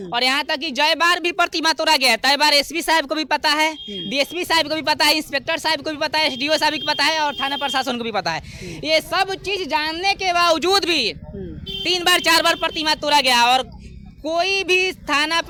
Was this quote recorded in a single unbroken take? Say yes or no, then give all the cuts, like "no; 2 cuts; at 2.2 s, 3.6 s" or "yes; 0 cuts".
yes; 0 cuts